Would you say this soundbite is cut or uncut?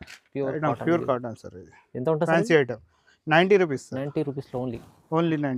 uncut